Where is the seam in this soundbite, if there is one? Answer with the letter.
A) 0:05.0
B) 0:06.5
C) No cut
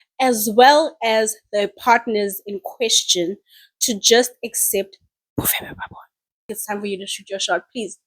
B